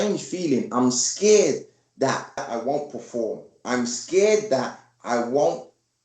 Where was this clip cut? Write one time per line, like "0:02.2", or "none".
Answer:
0:02.4